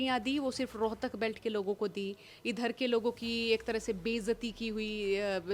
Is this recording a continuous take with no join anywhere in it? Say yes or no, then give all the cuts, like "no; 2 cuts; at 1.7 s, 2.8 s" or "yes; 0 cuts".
yes; 0 cuts